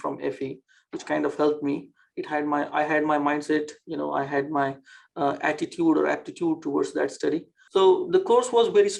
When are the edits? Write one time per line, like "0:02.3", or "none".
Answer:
0:07.6

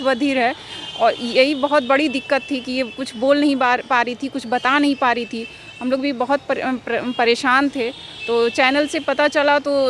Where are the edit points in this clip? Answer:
none

